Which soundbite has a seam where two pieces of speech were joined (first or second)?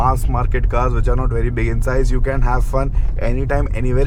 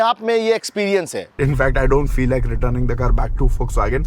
second